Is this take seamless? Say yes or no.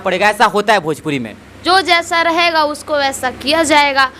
yes